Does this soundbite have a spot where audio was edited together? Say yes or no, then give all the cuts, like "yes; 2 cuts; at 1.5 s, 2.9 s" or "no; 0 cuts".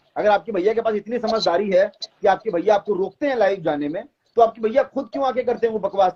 no; 0 cuts